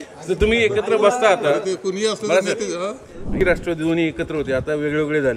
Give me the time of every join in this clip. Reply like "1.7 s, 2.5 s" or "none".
3.4 s